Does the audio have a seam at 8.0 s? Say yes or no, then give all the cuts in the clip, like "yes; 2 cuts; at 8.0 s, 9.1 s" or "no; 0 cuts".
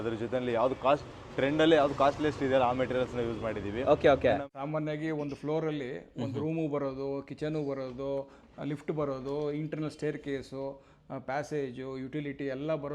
no; 1 cut; at 4.4 s